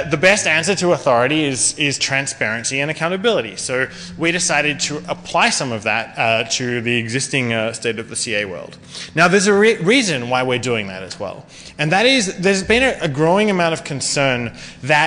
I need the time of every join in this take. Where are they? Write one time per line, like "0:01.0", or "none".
none